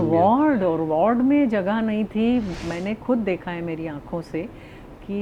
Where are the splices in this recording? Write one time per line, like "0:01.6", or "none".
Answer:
0:02.5